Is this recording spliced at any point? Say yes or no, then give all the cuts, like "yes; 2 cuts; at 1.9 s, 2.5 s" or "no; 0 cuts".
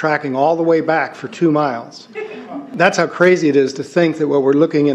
no; 0 cuts